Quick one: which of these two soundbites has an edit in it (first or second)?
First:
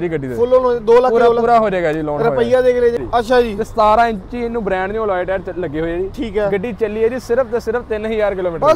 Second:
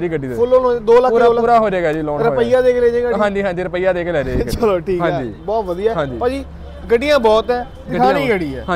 first